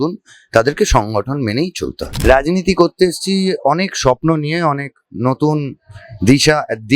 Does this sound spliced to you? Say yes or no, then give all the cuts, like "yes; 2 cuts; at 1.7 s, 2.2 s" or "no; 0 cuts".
yes; 1 cut; at 2.1 s